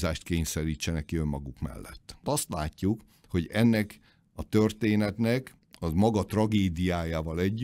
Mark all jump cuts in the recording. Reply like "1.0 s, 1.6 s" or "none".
2.2 s